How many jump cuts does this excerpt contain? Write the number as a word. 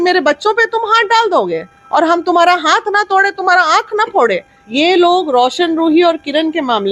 one